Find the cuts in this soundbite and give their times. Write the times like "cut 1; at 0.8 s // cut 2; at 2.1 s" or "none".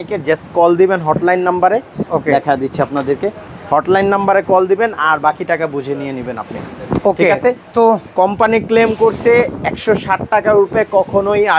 none